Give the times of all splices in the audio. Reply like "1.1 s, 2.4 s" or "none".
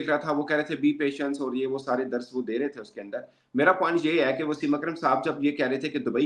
none